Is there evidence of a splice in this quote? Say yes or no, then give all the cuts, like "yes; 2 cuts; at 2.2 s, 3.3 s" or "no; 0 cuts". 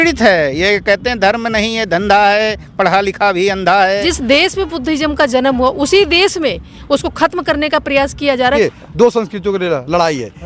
yes; 2 cuts; at 4.1 s, 8.6 s